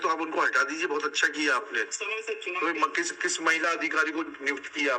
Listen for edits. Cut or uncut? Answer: uncut